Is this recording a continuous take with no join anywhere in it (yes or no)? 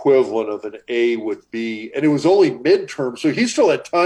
yes